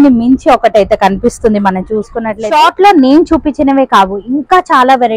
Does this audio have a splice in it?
yes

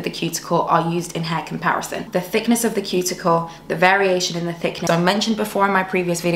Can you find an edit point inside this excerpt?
yes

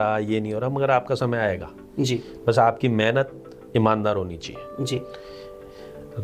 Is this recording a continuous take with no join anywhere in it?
yes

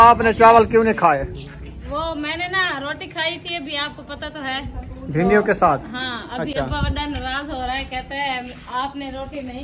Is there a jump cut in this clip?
no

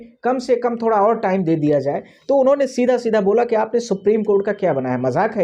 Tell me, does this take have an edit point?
no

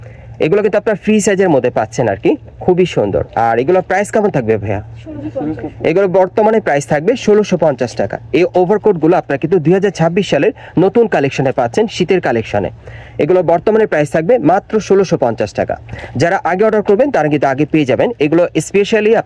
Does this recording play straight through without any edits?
yes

